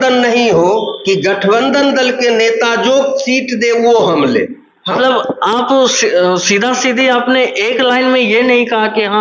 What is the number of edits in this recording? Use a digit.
0